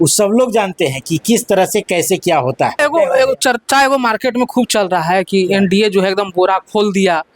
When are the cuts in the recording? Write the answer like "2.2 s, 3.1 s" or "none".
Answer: 2.8 s